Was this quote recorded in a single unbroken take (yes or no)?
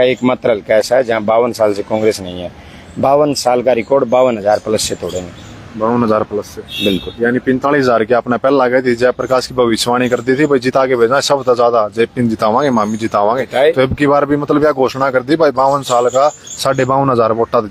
yes